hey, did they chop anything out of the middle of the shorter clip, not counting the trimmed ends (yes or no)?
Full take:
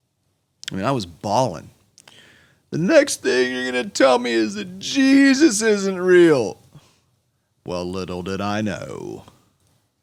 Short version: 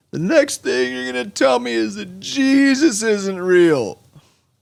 no